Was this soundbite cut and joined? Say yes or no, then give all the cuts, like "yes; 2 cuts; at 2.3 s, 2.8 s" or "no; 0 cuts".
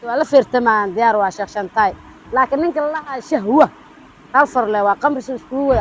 no; 0 cuts